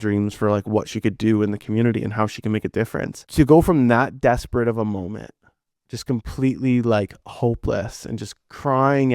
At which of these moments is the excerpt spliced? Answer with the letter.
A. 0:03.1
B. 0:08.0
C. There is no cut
A